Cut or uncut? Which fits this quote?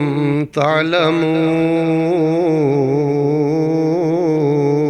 uncut